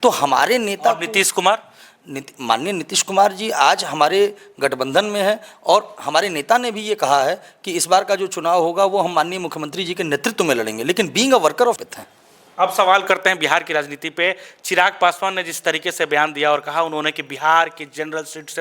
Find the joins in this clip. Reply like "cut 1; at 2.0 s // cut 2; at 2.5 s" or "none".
cut 1; at 11.8 s